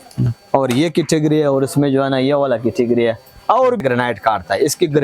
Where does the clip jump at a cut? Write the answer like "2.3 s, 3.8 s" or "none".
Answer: 3.8 s